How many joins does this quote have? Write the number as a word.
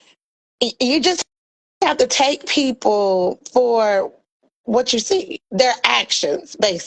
zero